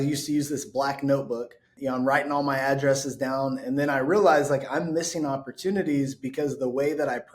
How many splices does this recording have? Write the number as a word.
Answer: one